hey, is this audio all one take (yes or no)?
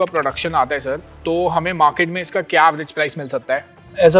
yes